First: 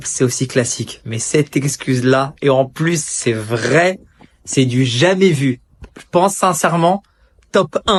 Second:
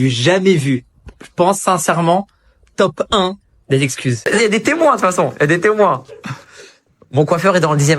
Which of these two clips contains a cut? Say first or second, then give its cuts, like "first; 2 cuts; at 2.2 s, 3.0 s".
second; 1 cut; at 4.1 s